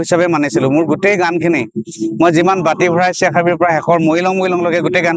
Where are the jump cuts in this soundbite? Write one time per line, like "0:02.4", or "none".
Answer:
none